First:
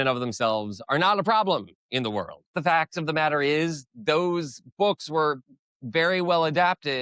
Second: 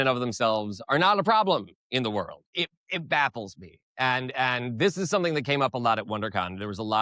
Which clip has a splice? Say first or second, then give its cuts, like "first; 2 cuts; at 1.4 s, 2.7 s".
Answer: first; 1 cut; at 2.5 s